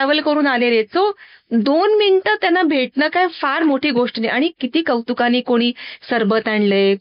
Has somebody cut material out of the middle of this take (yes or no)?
no